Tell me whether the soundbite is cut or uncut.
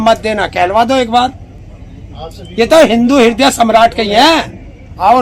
uncut